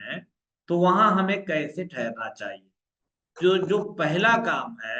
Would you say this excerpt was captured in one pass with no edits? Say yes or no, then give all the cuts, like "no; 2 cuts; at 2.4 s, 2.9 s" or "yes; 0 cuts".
yes; 0 cuts